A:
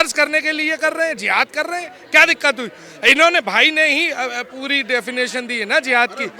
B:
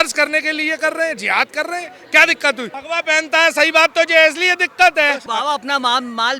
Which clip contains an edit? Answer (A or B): B